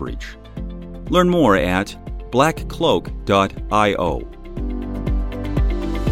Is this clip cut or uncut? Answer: cut